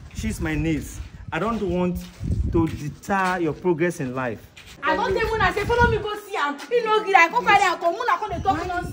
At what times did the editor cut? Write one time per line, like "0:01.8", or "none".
0:04.7